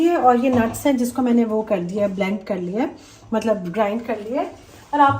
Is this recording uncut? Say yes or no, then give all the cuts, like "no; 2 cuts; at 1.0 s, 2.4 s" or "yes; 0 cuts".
yes; 0 cuts